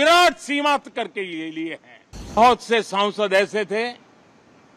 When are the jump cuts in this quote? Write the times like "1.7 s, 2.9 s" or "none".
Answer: 2.4 s